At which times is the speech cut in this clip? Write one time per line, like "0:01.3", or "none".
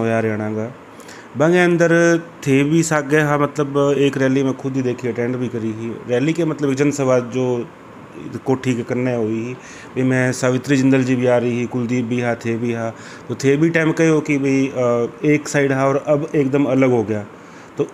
none